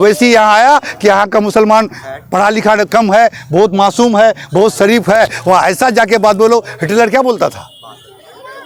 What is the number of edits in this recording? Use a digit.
0